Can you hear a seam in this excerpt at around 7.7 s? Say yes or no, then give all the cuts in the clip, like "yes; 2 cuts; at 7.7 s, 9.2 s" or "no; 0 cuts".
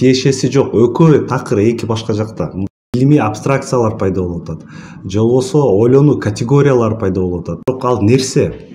yes; 2 cuts; at 2.9 s, 7.7 s